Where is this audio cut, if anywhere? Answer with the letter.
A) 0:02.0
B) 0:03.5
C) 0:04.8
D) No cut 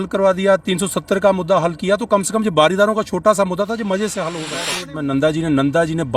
C